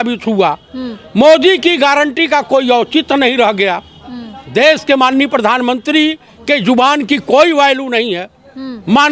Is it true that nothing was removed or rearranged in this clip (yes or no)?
yes